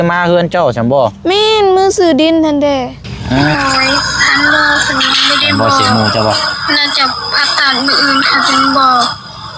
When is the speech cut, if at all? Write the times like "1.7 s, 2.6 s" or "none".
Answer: 3.5 s